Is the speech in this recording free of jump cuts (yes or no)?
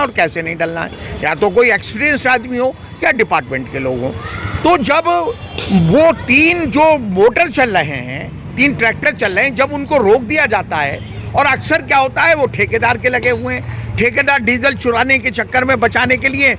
yes